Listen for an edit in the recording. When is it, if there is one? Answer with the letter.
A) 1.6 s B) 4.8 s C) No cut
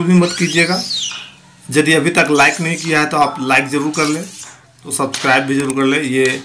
B